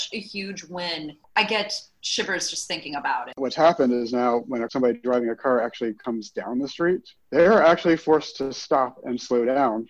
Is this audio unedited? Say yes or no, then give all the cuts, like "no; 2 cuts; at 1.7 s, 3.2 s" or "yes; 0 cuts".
no; 5 cuts; at 1.3 s, 3.4 s, 4.7 s, 6.0 s, 7.1 s